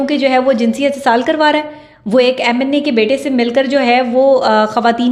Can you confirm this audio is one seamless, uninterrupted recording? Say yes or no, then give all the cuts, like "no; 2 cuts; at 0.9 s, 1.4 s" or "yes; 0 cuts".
yes; 0 cuts